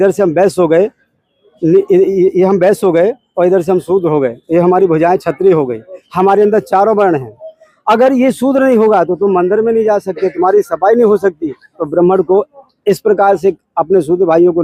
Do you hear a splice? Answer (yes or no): no